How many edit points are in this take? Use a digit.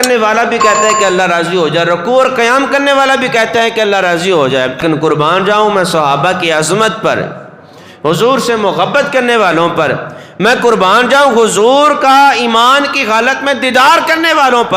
1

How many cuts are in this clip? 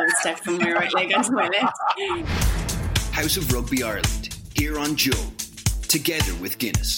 1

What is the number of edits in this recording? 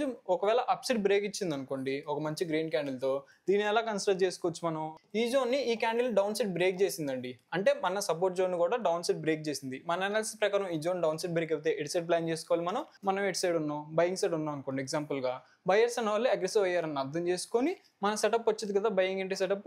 2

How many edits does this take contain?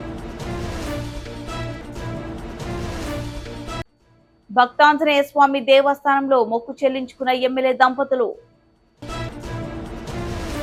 0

